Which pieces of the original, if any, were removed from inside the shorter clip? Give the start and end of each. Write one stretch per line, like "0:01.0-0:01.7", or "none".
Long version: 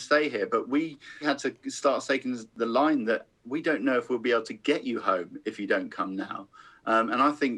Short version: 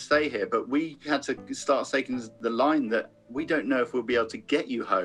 0:01.0-0:01.1